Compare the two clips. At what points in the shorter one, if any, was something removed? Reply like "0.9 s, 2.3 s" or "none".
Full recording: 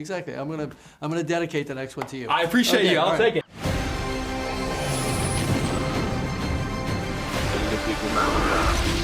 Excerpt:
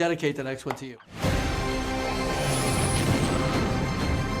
1.0 s